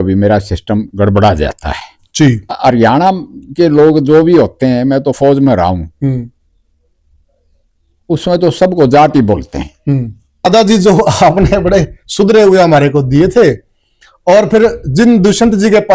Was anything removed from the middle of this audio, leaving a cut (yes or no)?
yes